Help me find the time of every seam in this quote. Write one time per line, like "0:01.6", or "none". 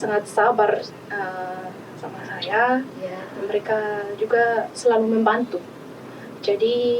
none